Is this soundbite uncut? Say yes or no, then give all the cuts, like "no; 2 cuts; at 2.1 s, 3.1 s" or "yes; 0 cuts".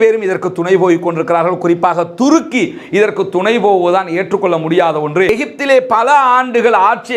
no; 1 cut; at 5.3 s